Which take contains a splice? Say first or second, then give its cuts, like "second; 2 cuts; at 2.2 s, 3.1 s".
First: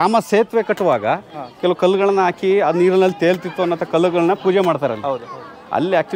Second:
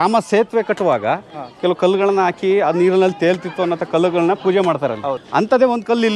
second; 1 cut; at 5.2 s